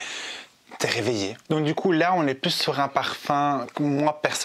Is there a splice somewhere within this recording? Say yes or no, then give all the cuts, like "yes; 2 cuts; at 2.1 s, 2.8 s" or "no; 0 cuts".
no; 0 cuts